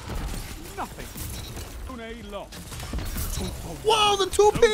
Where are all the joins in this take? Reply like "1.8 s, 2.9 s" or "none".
1.9 s